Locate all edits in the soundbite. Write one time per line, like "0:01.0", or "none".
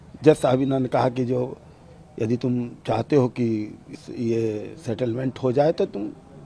none